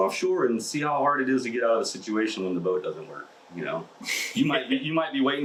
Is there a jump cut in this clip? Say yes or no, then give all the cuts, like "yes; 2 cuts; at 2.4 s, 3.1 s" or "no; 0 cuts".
no; 0 cuts